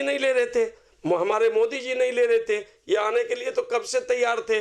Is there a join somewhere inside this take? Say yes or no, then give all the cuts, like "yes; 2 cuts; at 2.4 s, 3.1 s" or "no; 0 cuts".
no; 0 cuts